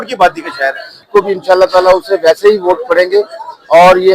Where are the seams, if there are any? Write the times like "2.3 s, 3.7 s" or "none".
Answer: 1.0 s